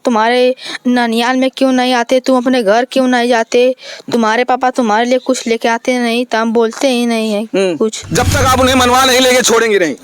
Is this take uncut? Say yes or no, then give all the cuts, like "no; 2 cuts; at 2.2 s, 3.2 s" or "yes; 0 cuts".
no; 1 cut; at 8.0 s